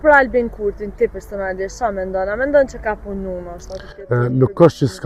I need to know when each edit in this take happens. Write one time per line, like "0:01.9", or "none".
none